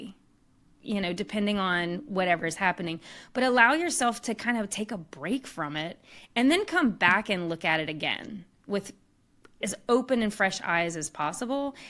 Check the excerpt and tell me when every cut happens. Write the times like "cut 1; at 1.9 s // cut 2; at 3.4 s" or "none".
cut 1; at 9.6 s